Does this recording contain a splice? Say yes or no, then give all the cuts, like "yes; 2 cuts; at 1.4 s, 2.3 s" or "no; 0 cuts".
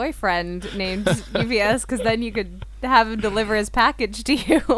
no; 0 cuts